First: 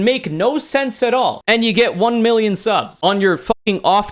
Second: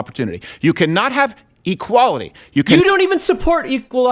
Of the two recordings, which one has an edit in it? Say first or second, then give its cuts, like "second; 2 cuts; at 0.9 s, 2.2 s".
first; 2 cuts; at 1.4 s, 2.9 s